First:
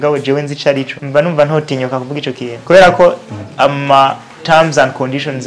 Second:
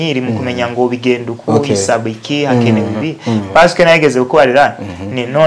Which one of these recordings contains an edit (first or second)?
first